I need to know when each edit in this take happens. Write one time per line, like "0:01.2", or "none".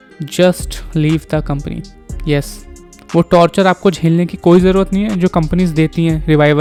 none